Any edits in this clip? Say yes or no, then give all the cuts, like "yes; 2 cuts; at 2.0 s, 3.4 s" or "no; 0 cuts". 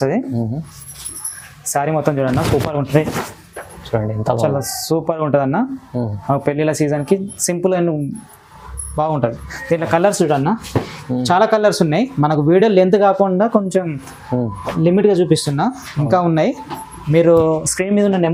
no; 0 cuts